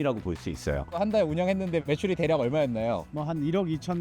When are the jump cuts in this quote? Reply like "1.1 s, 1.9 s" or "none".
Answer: 1.0 s, 1.8 s